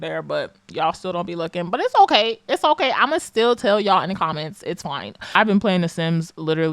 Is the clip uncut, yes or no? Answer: no